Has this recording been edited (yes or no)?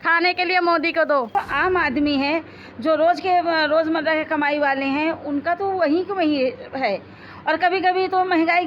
yes